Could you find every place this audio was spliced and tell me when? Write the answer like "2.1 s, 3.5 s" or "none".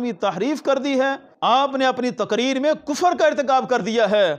1.3 s